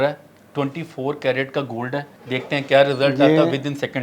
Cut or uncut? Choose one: cut